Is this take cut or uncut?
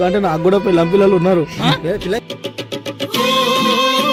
uncut